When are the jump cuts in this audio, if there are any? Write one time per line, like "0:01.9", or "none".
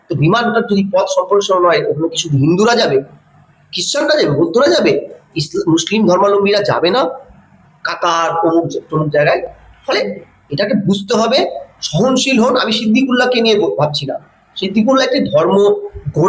none